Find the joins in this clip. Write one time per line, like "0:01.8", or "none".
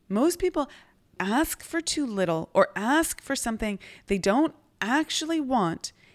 0:01.1